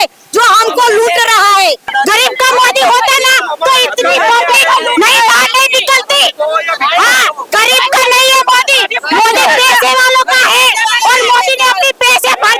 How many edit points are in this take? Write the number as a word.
one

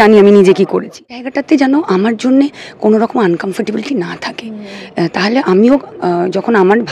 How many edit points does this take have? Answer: one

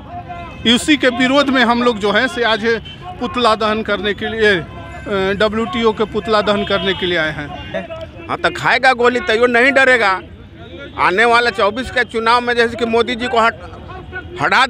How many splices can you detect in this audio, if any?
one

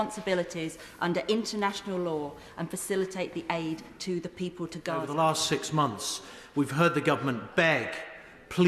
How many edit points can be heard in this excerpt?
one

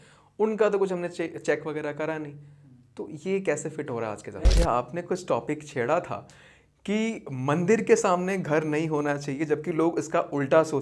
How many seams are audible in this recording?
one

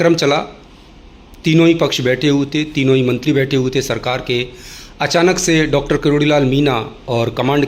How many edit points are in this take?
zero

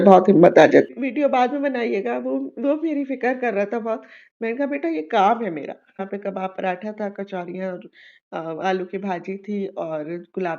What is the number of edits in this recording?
two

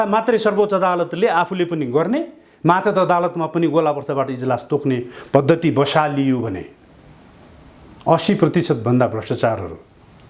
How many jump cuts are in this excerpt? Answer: zero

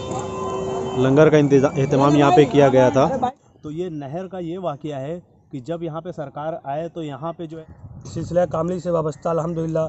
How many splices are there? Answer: two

